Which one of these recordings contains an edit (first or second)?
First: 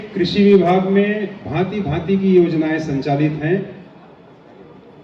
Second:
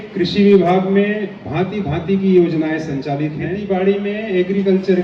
second